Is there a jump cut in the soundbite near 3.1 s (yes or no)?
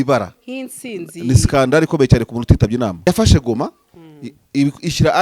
yes